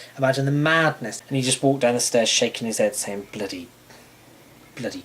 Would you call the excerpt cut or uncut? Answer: cut